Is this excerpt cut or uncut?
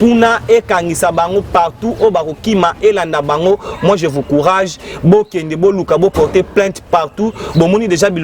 uncut